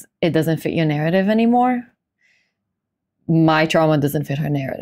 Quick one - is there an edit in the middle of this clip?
no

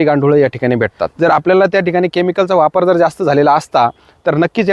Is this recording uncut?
no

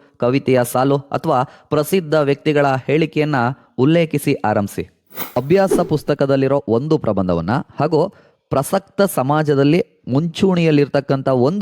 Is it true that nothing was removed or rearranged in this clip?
no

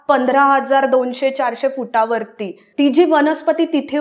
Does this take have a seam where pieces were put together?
yes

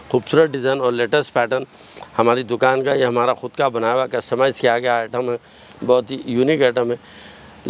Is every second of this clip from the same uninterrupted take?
yes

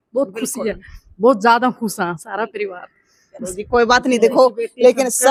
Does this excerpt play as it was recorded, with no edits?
yes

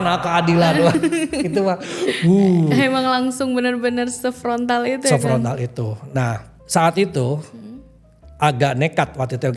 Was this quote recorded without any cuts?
yes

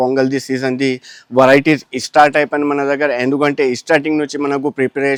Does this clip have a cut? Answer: no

